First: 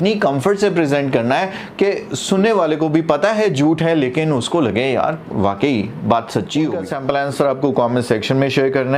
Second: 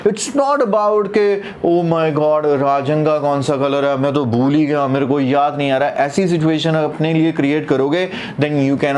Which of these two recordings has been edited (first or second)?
first